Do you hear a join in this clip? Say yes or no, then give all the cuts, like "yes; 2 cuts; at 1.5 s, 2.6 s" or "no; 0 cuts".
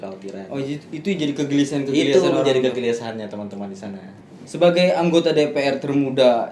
yes; 1 cut; at 4.2 s